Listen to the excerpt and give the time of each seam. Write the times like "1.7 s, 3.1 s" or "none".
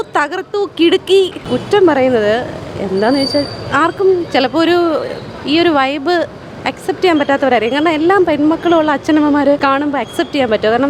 none